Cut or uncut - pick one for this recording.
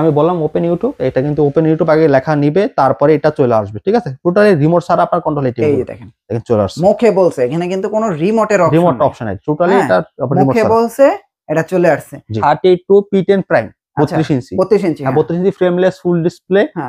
cut